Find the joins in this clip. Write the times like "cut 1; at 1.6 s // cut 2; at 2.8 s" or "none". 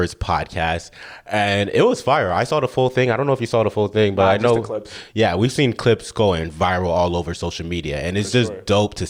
none